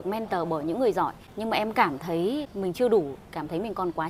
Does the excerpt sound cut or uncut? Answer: cut